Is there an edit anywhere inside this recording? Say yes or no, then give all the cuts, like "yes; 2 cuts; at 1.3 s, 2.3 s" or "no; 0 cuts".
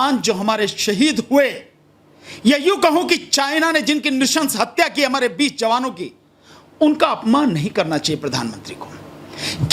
no; 0 cuts